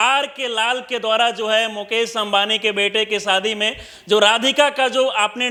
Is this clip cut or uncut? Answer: uncut